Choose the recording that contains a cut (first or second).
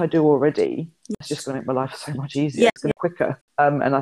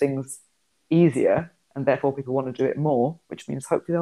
first